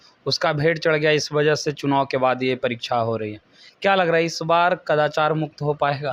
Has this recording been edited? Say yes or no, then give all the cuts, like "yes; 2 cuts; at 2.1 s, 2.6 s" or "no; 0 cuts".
no; 0 cuts